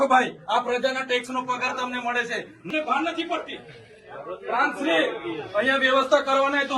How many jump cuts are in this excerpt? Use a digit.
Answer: 1